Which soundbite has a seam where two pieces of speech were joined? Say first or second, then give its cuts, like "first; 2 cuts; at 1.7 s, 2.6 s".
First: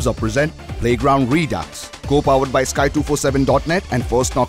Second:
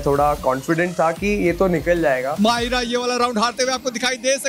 second; 1 cut; at 2.3 s